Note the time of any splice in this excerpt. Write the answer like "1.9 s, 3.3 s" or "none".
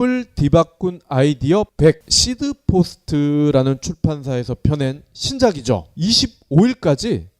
1.6 s